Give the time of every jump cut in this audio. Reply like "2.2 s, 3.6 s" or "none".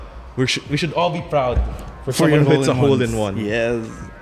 none

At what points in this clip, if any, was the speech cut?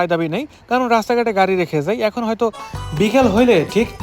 2.6 s

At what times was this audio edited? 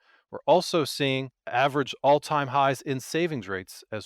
1.3 s

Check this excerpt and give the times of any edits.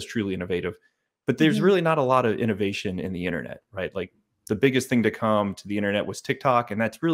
none

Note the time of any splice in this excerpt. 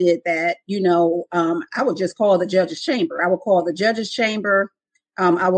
none

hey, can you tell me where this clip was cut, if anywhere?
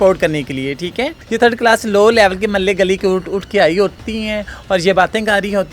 1.2 s

